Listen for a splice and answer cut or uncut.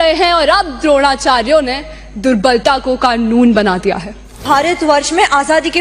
cut